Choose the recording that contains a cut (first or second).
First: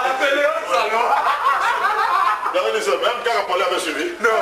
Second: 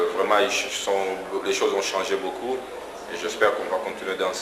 second